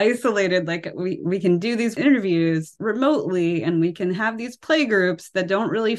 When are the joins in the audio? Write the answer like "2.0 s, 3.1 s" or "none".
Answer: 1.9 s, 2.7 s